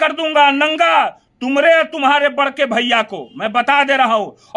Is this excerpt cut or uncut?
uncut